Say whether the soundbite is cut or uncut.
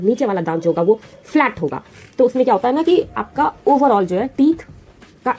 uncut